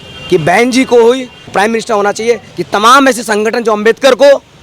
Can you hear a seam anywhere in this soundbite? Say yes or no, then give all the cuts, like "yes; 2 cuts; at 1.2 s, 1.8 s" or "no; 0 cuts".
yes; 1 cut; at 2.5 s